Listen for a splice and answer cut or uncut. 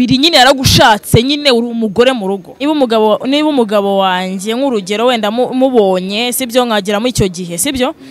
cut